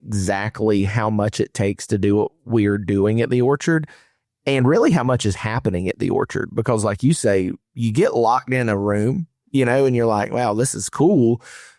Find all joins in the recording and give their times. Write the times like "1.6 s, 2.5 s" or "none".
none